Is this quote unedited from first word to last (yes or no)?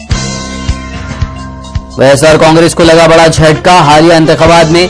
no